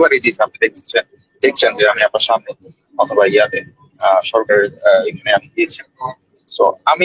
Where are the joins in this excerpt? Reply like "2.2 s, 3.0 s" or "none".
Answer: none